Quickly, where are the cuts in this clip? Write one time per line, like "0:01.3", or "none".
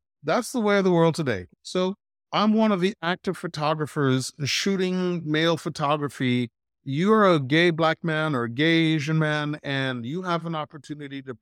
0:01.4